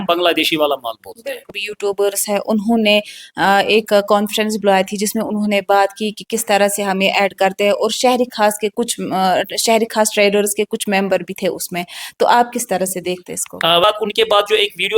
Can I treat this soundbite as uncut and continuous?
no; 2 cuts; at 1.7 s, 13.8 s

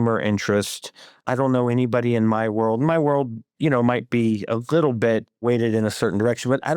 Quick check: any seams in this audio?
yes; 2 cuts; at 1.2 s, 5.4 s

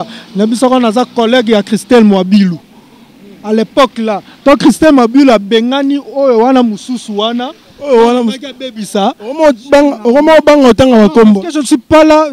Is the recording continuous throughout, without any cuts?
yes; 0 cuts

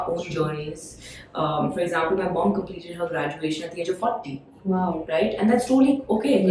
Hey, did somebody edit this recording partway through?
no; 0 cuts

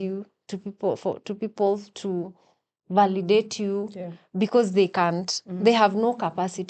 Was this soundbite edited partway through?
no; 0 cuts

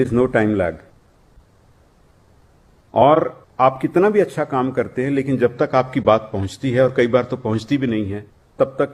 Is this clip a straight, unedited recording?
yes; 0 cuts

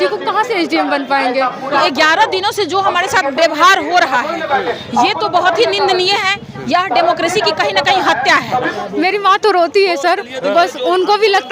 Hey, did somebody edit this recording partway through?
yes; 2 cuts; at 1.8 s, 8.7 s

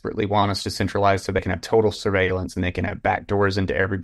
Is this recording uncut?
no; 1 cut; at 1.4 s

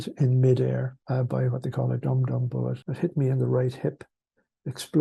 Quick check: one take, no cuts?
no; 2 cuts; at 1.0 s, 2.8 s

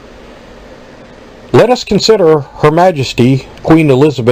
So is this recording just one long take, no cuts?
yes; 0 cuts

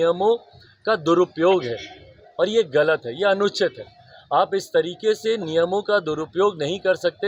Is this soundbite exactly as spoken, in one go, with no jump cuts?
yes; 0 cuts

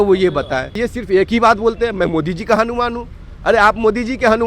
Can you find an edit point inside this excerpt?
yes; 1 cut; at 0.9 s

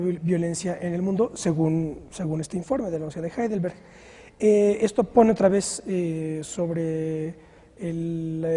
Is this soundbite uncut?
yes; 0 cuts

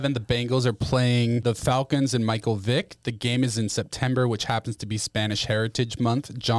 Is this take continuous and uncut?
no; 1 cut; at 1.4 s

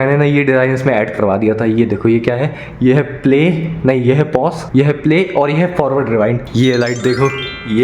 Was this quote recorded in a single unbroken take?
no; 1 cut; at 6.4 s

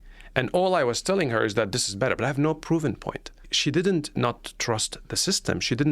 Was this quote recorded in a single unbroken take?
no; 1 cut; at 3.5 s

